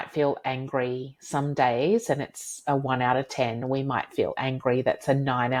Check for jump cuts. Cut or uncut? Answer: uncut